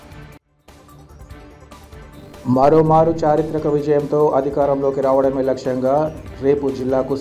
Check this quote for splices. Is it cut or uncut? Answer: cut